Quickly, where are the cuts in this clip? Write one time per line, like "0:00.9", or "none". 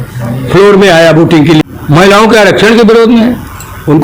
0:01.6